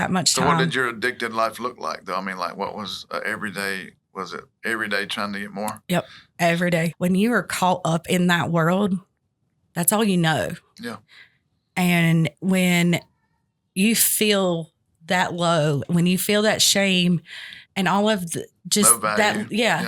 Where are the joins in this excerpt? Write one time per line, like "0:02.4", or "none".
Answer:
0:06.9